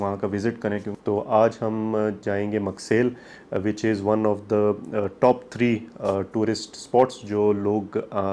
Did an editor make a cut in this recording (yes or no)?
yes